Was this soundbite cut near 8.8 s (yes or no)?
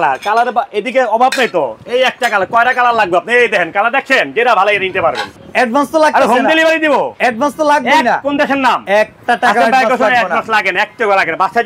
yes